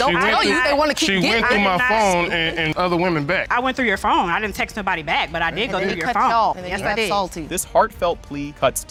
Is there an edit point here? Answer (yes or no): no